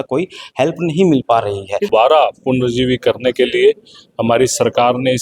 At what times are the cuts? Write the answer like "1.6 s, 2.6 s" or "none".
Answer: 1.9 s

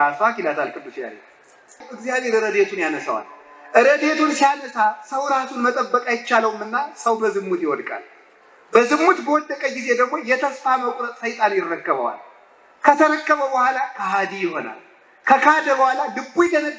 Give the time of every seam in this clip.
1.9 s

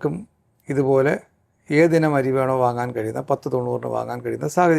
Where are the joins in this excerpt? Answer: none

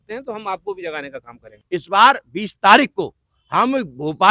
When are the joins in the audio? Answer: 1.5 s

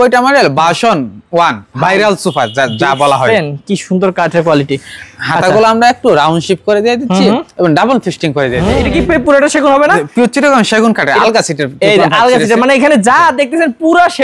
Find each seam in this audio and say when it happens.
8.7 s

